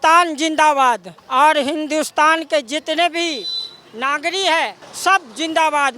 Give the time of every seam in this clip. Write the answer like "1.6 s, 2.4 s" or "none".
1.1 s, 4.8 s